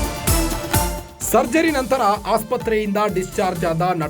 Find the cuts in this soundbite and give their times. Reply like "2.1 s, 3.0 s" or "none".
1.0 s